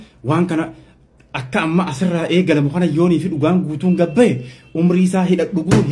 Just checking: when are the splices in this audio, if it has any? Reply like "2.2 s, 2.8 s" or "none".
none

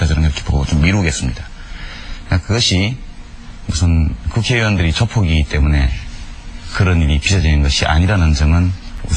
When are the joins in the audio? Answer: 2.8 s

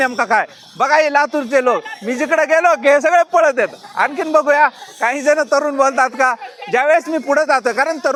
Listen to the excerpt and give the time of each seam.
none

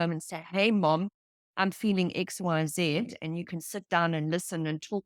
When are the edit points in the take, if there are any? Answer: none

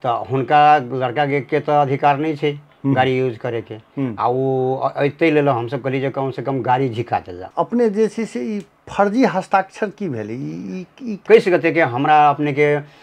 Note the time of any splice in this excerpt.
7.4 s, 11.2 s

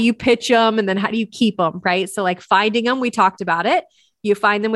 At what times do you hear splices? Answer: none

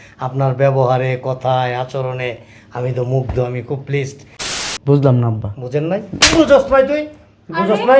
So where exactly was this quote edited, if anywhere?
4.6 s

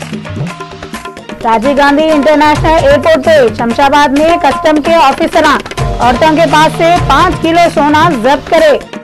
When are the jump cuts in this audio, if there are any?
1.0 s

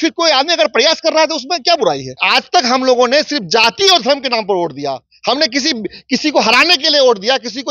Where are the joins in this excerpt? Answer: 2.1 s

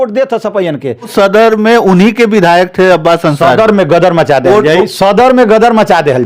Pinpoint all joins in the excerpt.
1.1 s

